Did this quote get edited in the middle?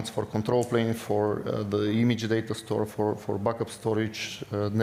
no; 0 cuts

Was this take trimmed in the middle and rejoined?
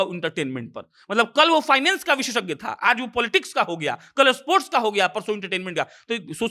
no; 0 cuts

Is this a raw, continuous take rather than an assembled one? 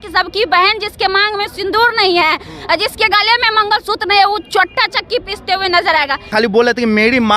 no; 1 cut; at 6.3 s

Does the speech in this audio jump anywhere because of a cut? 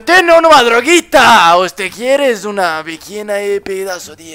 no; 0 cuts

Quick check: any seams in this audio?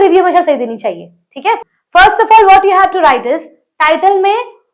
yes; 1 cut; at 1.7 s

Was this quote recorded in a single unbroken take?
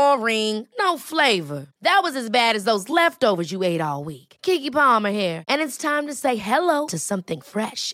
yes; 0 cuts

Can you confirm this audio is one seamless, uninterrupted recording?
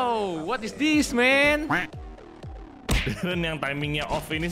no; 1 cut; at 2.9 s

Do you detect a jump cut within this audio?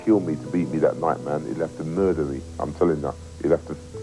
no; 0 cuts

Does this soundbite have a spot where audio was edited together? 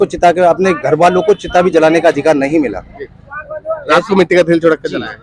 no; 0 cuts

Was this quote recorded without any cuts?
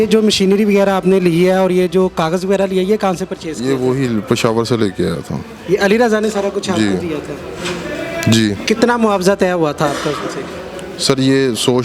yes; 0 cuts

